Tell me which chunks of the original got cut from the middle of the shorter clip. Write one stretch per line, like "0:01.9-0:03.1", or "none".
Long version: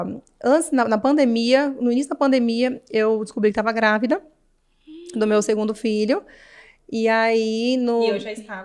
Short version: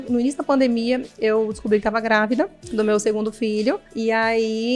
0:04.3-0:05.0
0:06.3-0:06.8